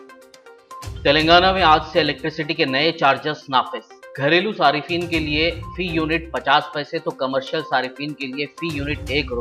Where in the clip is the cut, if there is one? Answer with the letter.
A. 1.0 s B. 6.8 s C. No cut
C